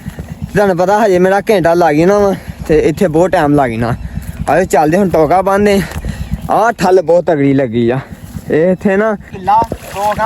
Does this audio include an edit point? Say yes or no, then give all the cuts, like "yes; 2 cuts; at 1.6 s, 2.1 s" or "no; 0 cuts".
yes; 1 cut; at 9.3 s